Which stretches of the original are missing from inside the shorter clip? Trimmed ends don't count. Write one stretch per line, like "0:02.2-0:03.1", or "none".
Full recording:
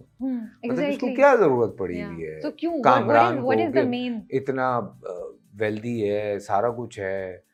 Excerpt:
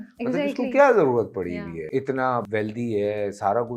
0:02.2-0:04.2
0:04.9-0:05.5